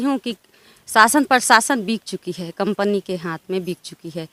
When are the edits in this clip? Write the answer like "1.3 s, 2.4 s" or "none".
none